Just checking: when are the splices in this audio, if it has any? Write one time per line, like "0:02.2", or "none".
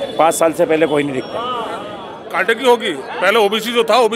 0:02.5